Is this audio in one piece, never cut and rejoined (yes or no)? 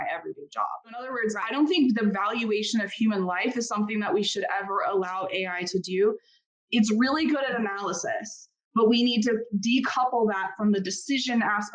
no